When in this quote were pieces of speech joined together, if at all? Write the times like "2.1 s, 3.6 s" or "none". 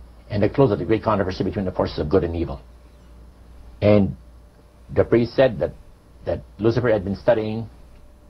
1.4 s, 2.8 s